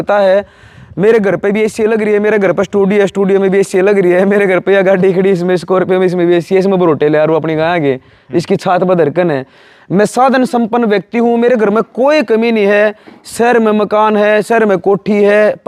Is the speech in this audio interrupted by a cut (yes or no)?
no